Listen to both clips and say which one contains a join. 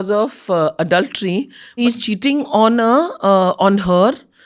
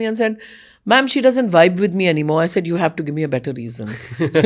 first; 1 cut; at 1.8 s

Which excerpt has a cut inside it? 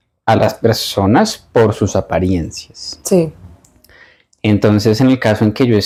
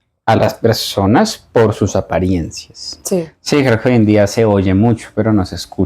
second; 1 cut; at 3.3 s

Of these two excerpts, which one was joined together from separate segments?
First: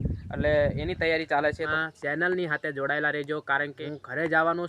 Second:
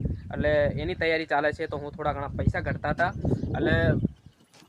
first; 2 cuts; at 1.7 s, 3.8 s

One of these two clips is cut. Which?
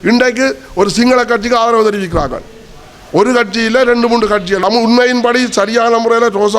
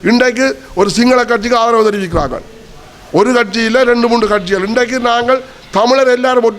first; 1 cut; at 4.6 s

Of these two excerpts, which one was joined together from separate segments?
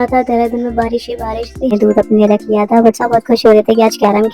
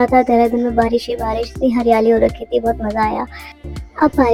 first; 1 cut; at 1.7 s

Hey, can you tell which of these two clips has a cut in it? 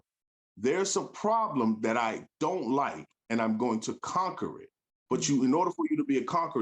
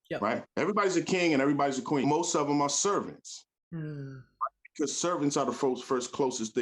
second; 1 cut; at 2.0 s

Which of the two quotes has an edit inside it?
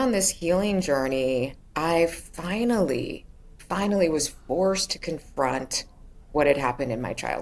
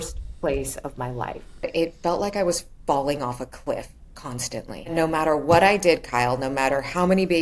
second; 2 cuts; at 1.7 s, 4.9 s

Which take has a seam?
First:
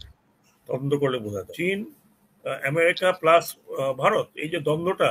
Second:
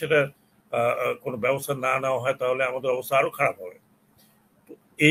first; 1 cut; at 1.5 s

